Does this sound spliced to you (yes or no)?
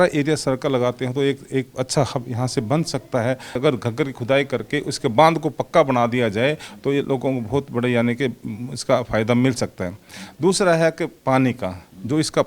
yes